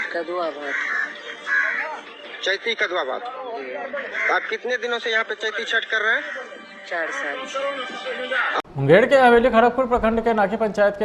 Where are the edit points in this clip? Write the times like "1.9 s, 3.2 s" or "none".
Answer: 8.8 s